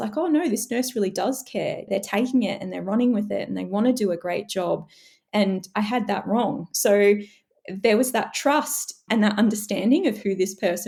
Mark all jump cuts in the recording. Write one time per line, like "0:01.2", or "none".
none